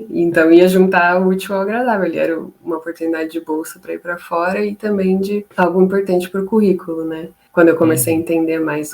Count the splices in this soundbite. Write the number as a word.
one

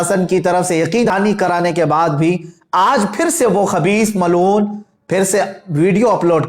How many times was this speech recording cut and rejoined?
one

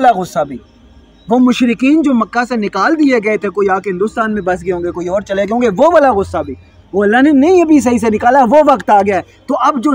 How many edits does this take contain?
zero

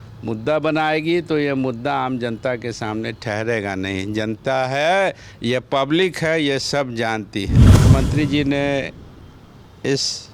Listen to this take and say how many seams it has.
one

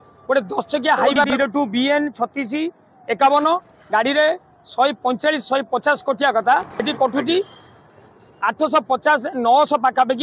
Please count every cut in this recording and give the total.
two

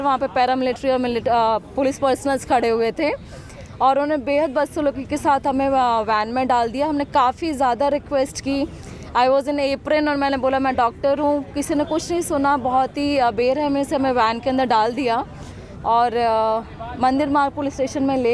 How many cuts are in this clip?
zero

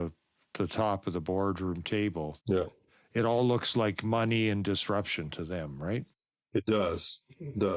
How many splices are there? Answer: one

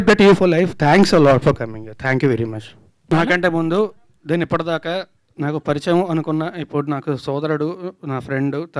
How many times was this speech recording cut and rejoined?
one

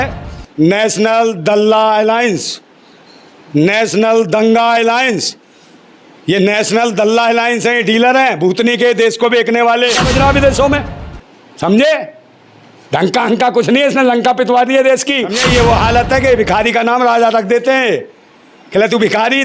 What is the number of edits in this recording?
two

